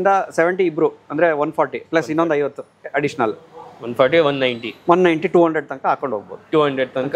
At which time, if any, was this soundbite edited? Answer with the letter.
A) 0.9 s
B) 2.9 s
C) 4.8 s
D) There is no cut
D